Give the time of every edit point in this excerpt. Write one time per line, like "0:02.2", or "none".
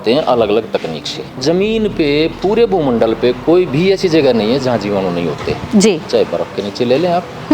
0:01.4

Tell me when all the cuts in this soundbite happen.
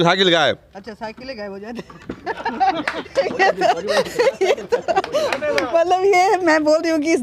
none

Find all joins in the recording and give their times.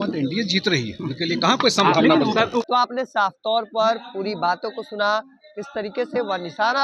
none

